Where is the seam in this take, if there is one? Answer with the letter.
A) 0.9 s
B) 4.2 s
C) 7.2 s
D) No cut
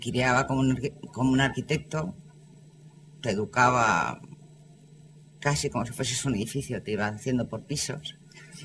A